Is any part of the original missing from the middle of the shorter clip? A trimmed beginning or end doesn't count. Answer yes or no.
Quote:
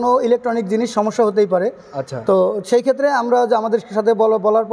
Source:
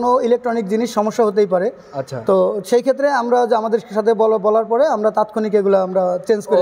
no